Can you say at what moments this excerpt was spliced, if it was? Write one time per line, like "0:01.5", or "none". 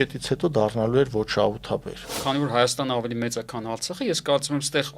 0:02.1